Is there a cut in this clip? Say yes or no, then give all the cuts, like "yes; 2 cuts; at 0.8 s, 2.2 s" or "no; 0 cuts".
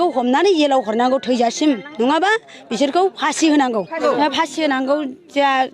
yes; 1 cut; at 4.0 s